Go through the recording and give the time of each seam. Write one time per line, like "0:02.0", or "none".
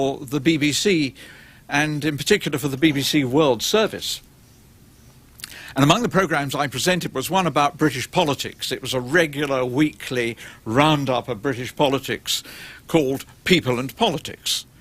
0:12.6